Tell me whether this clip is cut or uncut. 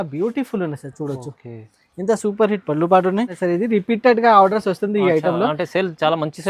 cut